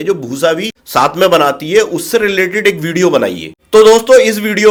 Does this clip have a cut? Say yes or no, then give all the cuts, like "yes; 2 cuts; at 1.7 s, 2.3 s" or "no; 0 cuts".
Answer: no; 0 cuts